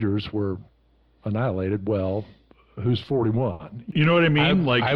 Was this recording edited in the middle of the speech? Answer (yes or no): yes